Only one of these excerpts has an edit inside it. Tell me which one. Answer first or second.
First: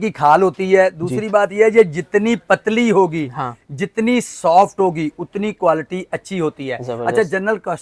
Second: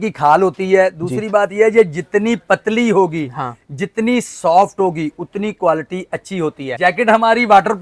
second